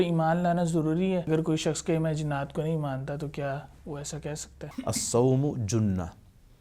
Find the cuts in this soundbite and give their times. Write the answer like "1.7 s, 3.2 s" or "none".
1.3 s, 4.6 s